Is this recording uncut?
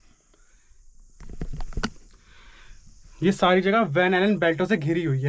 yes; 0 cuts

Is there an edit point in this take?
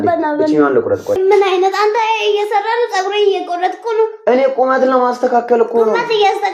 yes; 1 cut; at 1.2 s

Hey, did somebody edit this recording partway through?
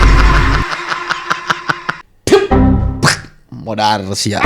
yes; 1 cut; at 2.0 s

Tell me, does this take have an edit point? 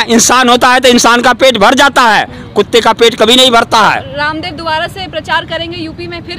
no; 0 cuts

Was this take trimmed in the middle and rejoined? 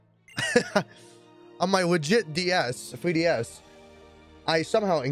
no; 0 cuts

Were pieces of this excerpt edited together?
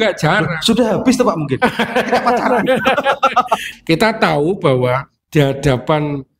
yes; 1 cut; at 3.7 s

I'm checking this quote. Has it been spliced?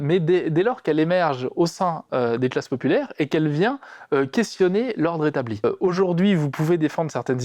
yes; 1 cut; at 5.6 s

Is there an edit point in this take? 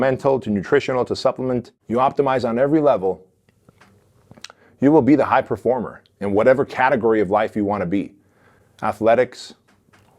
yes; 1 cut; at 1.7 s

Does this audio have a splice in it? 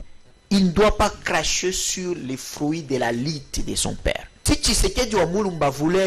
yes; 1 cut; at 4.3 s

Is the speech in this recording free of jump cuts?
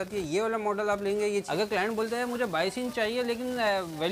no; 1 cut; at 1.5 s

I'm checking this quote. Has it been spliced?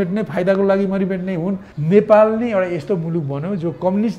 yes; 1 cut; at 1.7 s

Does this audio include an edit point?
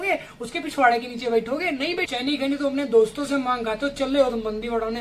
yes; 1 cut; at 2.1 s

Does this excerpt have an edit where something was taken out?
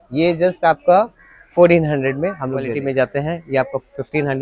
yes; 1 cut; at 2.8 s

